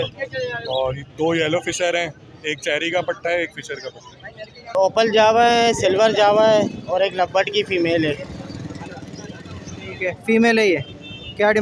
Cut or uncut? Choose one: cut